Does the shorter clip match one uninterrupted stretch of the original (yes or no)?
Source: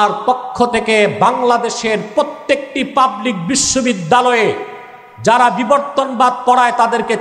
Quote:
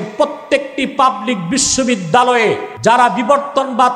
no